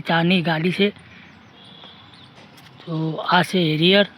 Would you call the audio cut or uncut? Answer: uncut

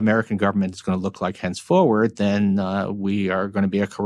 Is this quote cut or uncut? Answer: uncut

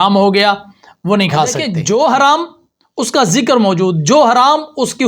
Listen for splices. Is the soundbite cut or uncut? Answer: cut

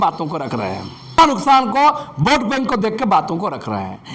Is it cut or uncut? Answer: cut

